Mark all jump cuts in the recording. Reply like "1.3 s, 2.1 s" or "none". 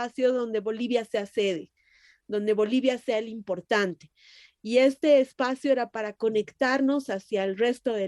none

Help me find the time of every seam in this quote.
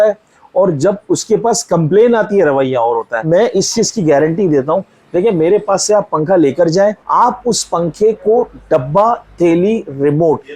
3.2 s, 7.0 s

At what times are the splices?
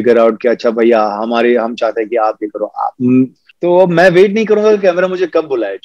3.4 s

